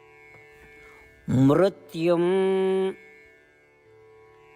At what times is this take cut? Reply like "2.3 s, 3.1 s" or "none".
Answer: 0.9 s